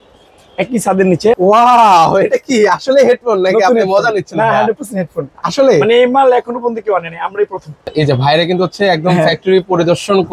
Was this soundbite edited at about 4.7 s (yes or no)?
no